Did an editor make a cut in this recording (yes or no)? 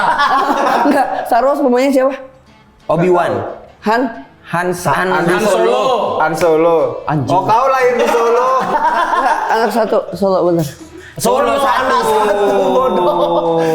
no